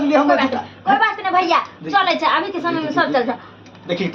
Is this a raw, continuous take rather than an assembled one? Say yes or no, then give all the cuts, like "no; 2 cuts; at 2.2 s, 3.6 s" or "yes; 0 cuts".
yes; 0 cuts